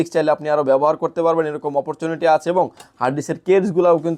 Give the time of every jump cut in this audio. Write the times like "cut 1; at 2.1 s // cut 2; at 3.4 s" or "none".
none